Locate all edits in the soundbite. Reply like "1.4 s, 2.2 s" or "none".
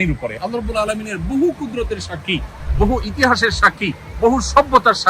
none

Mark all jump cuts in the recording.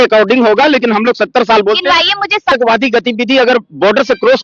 2.5 s

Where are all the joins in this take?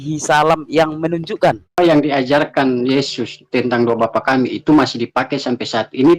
1.8 s

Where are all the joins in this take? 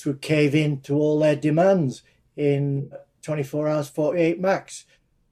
3.1 s

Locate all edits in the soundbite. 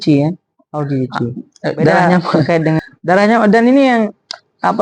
1.5 s

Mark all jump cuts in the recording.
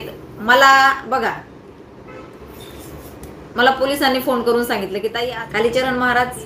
5.1 s

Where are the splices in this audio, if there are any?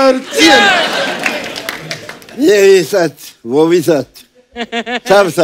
none

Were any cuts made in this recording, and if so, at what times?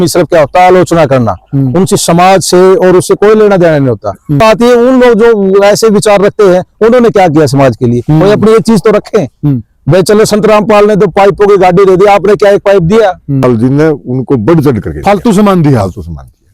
4.4 s, 13.4 s

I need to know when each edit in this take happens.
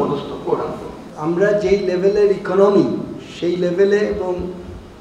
1.0 s

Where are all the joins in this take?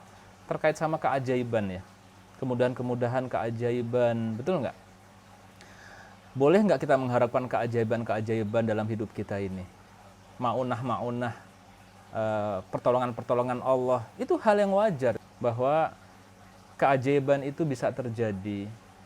14.1 s, 15.2 s

